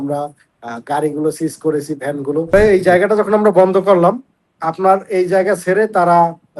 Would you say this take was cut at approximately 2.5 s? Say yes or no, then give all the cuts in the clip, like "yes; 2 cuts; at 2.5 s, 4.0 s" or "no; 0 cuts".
yes; 1 cut; at 2.5 s